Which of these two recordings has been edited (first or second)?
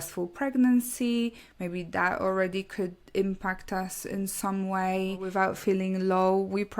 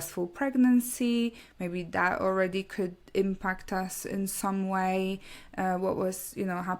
first